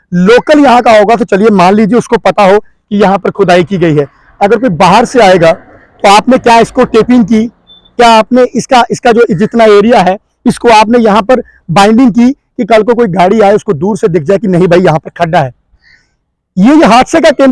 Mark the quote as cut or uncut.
uncut